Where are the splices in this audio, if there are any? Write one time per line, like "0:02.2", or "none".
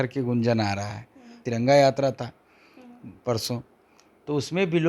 0:01.4